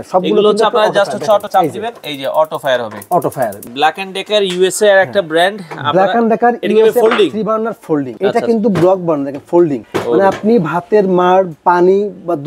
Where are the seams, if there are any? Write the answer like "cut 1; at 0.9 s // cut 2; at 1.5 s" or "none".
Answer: cut 1; at 1.5 s // cut 2; at 3.6 s

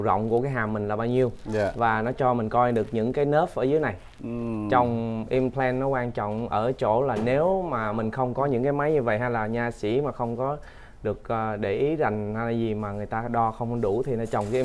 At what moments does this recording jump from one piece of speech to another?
none

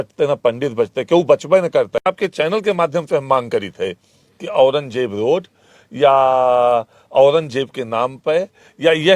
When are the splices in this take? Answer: cut 1; at 2.0 s

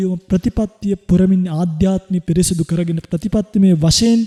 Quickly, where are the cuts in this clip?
none

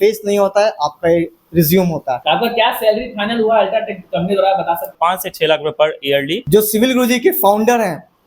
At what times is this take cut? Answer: cut 1; at 2.2 s // cut 2; at 4.9 s // cut 3; at 6.4 s

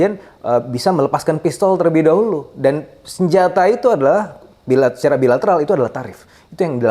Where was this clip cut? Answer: none

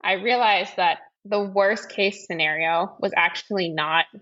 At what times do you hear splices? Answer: cut 1; at 1.1 s

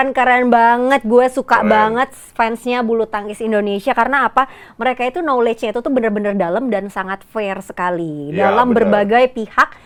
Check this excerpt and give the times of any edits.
none

